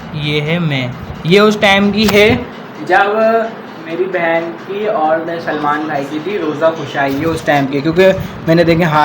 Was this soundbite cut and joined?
no; 0 cuts

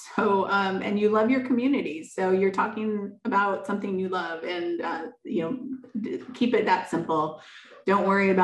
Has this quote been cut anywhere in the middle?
no; 0 cuts

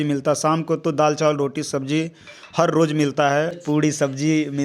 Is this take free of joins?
no; 1 cut; at 3.5 s

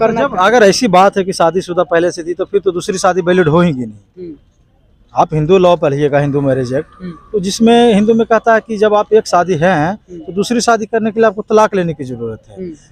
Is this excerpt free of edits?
yes; 0 cuts

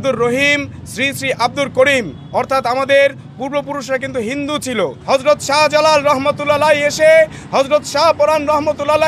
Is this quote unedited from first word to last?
no; 1 cut; at 5.0 s

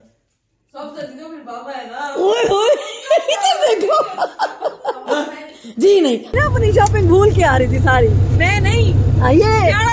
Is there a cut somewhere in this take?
yes; 1 cut; at 6.4 s

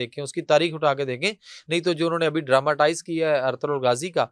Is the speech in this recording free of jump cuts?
yes; 0 cuts

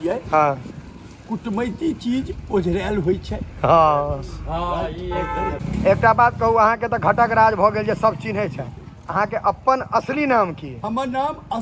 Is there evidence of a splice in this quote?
yes; 1 cut; at 5.6 s

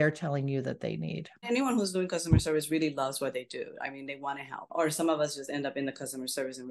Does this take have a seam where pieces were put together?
yes; 2 cuts; at 1.5 s, 4.7 s

